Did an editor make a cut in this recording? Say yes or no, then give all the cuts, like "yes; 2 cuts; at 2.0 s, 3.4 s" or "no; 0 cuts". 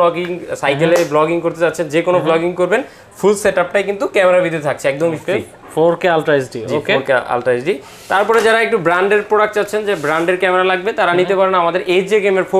no; 0 cuts